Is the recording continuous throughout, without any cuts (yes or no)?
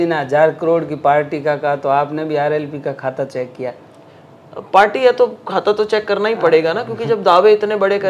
yes